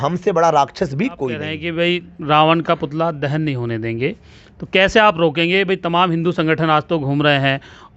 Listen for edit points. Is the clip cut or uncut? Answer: cut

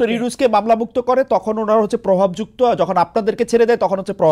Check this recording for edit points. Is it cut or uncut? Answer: uncut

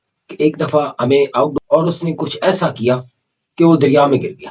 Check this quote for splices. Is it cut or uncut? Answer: cut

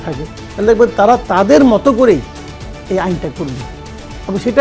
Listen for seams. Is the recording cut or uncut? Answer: uncut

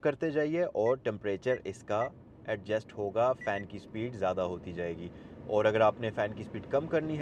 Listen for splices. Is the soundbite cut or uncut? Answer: uncut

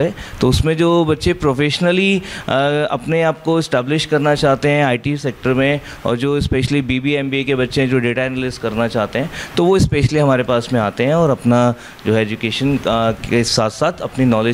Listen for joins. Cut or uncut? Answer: uncut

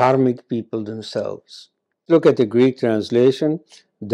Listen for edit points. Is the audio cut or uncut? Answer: cut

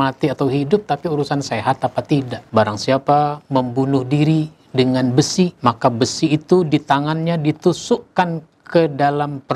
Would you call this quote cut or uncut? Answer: cut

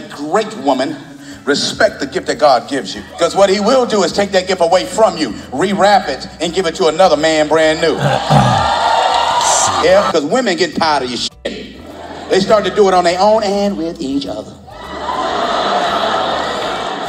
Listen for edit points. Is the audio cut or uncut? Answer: cut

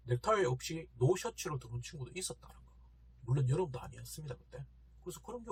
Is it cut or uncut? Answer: uncut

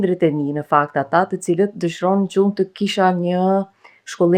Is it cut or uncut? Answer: uncut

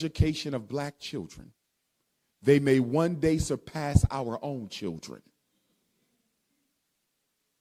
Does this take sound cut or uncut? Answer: uncut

